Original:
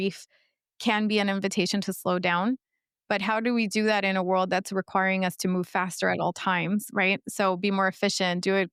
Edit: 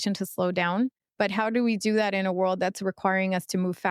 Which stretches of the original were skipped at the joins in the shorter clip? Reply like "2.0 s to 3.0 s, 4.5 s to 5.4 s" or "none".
2.7 s to 2.9 s